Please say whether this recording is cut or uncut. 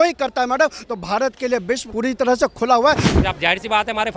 cut